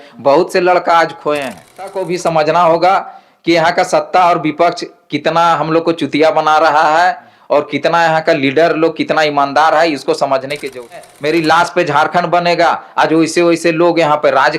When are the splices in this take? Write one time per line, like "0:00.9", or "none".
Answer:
0:01.9
0:11.0